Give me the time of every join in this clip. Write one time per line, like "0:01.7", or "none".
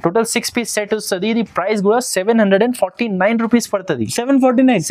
none